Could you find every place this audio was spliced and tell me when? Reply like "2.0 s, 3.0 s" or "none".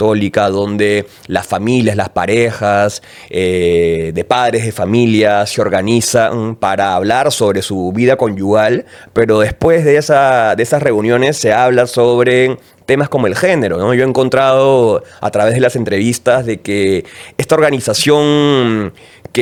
none

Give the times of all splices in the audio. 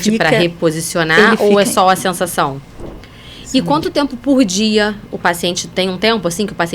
2.7 s

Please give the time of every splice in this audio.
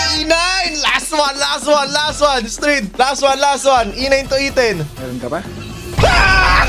none

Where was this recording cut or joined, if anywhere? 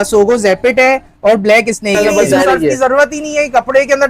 2.0 s

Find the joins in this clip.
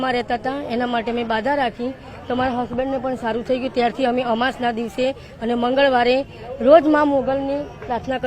none

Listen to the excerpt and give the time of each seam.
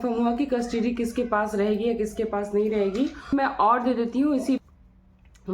3.3 s, 4.6 s

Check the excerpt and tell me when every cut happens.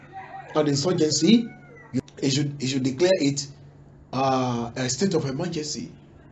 2.0 s

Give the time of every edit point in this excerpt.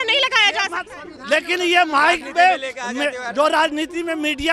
none

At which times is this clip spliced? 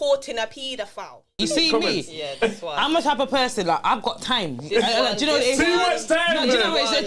1.4 s

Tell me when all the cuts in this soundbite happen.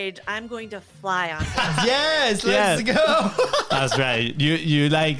none

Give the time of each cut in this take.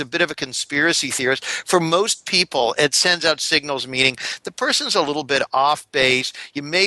none

